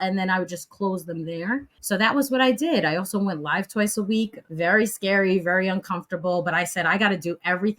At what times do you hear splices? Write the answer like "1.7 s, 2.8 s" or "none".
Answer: 1.7 s, 4.4 s